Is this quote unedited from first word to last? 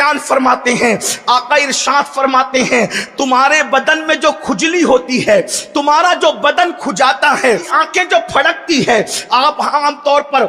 no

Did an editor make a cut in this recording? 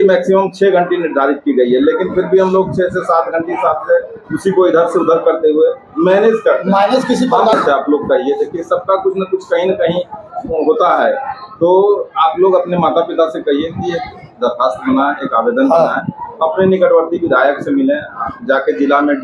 yes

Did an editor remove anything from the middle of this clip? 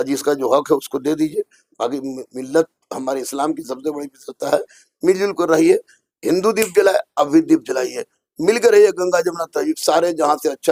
no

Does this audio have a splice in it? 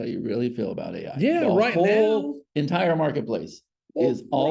no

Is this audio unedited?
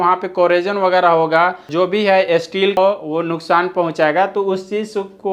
no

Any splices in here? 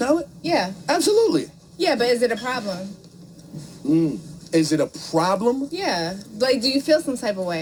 no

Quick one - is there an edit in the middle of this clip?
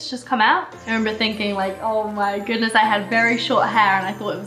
no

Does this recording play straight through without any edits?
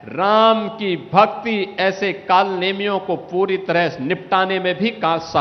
yes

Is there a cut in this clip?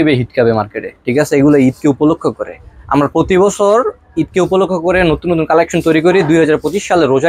no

